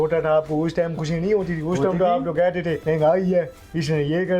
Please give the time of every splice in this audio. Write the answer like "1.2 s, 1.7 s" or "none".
2.8 s